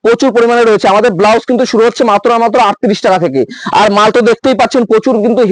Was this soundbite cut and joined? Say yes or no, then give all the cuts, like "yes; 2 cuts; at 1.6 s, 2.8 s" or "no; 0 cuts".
no; 0 cuts